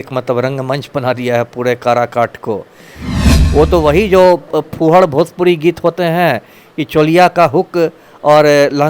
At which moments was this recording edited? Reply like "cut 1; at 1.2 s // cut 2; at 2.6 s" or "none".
cut 1; at 3.2 s